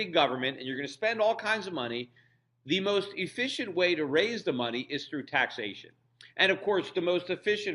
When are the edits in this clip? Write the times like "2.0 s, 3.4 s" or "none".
2.0 s